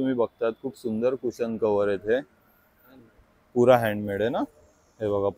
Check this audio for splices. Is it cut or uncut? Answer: uncut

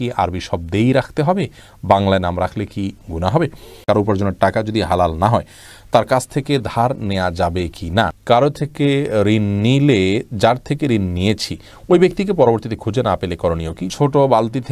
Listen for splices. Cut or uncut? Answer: cut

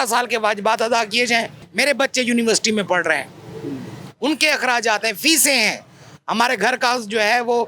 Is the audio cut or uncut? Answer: cut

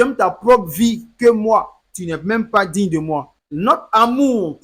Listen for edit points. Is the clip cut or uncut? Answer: cut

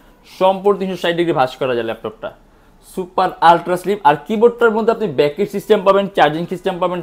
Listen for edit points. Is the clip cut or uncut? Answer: uncut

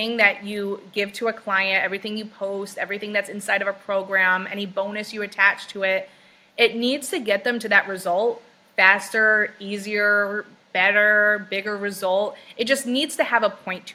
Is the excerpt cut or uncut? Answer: uncut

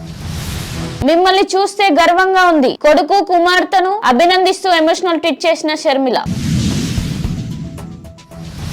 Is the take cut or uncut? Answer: cut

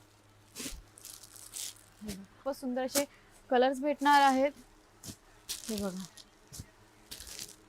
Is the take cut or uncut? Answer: cut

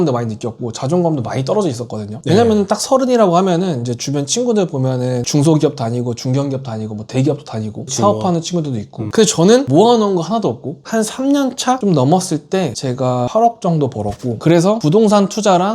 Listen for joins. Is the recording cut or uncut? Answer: cut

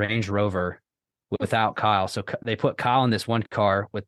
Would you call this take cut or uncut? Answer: cut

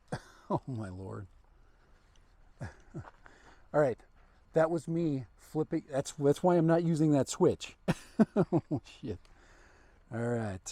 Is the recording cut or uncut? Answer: uncut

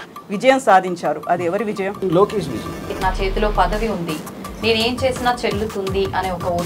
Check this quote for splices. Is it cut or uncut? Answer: cut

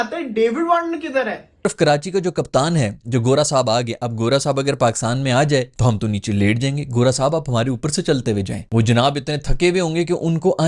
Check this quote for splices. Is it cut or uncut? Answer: cut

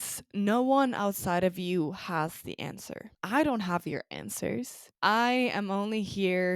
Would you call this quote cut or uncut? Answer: cut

